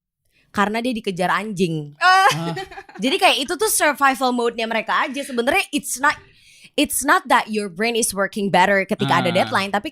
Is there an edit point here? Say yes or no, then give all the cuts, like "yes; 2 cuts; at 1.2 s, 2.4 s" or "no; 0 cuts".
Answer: no; 0 cuts